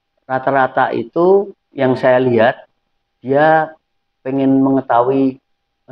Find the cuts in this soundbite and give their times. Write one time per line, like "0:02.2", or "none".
none

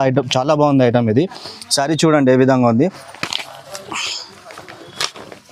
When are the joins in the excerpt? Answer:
none

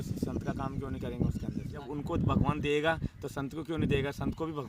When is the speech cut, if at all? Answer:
0:01.8

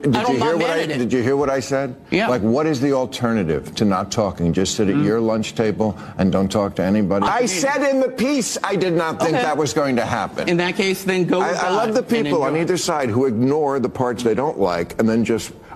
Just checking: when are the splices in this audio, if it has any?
0:07.3

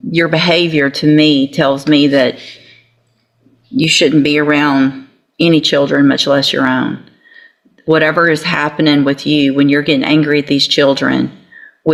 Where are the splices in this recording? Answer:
none

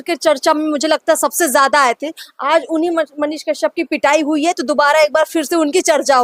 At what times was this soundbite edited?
none

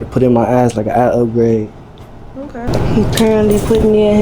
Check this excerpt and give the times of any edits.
0:02.7

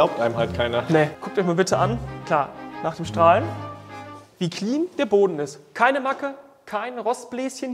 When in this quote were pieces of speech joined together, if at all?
0:01.2
0:02.1

